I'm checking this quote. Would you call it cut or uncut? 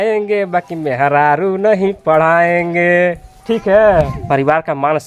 cut